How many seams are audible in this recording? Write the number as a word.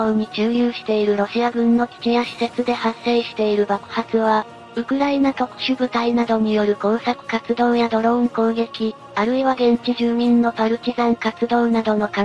one